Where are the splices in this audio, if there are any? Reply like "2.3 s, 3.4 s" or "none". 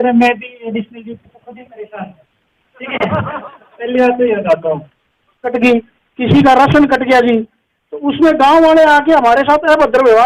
5.5 s